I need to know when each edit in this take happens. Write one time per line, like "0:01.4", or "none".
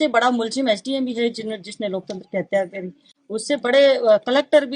none